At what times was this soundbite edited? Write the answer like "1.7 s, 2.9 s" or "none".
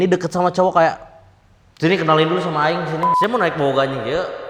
3.0 s